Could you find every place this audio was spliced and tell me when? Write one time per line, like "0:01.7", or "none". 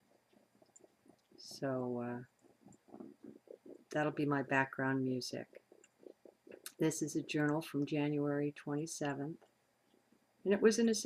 0:05.0